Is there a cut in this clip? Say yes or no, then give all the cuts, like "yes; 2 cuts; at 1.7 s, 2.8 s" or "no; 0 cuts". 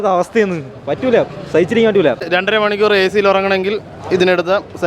yes; 1 cut; at 2.2 s